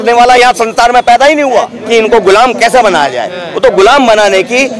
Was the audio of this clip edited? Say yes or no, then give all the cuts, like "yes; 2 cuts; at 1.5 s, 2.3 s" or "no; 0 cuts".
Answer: yes; 1 cut; at 1.8 s